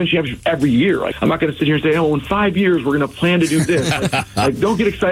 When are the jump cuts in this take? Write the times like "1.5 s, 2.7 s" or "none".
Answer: 1.1 s

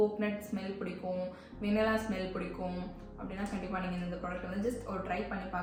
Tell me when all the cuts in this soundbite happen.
none

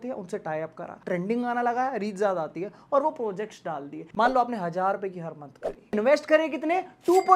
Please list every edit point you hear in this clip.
0.9 s, 4.0 s, 5.9 s

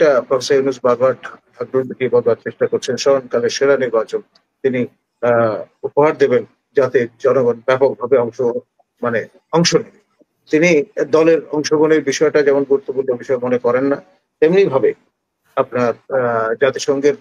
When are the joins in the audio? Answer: none

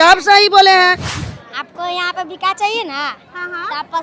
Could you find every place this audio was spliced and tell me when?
1.1 s

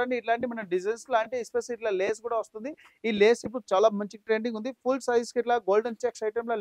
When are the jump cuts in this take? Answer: none

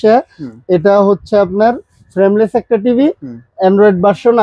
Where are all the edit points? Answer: none

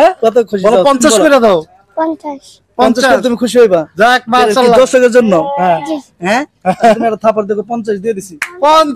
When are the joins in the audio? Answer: none

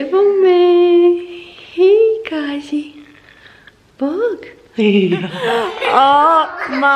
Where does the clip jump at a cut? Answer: none

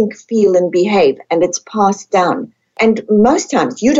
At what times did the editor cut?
2.7 s

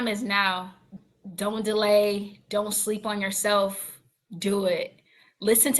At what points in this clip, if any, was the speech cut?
0.9 s

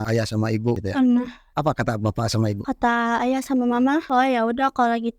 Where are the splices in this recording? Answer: 0.8 s, 1.5 s

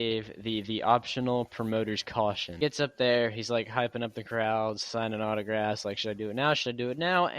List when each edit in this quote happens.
2.6 s

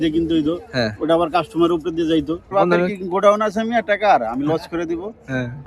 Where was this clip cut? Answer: 2.5 s

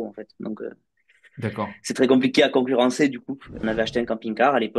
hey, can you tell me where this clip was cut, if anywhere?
3.5 s

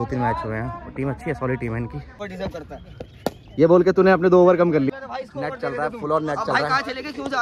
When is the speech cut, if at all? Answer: 2.2 s, 4.9 s

